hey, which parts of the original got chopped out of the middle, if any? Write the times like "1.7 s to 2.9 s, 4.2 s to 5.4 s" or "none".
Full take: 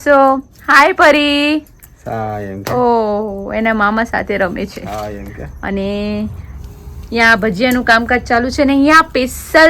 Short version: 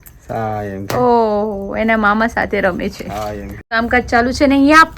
5.6 s to 8.0 s

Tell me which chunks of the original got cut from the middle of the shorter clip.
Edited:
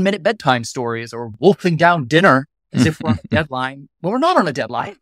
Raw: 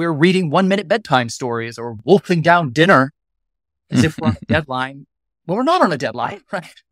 3.2 s to 3.8 s, 5.0 s to 5.3 s

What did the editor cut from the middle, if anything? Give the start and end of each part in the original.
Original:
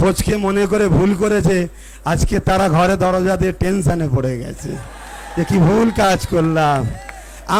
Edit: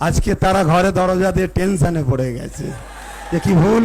none

